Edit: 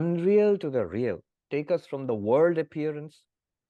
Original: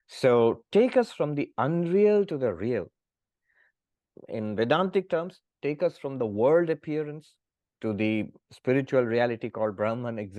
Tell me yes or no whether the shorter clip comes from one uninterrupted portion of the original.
no